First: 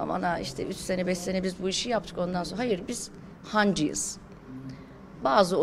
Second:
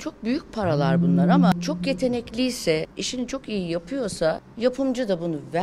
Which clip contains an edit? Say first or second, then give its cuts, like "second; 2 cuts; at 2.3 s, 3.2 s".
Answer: second; 3 cuts; at 1.5 s, 3.0 s, 4.5 s